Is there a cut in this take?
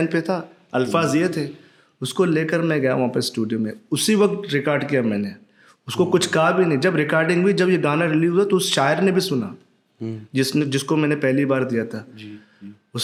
no; 0 cuts

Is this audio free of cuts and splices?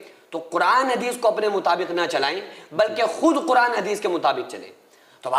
yes; 0 cuts

